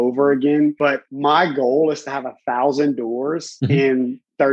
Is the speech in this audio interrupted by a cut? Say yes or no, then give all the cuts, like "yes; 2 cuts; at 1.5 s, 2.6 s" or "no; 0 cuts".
yes; 2 cuts; at 1.1 s, 3.5 s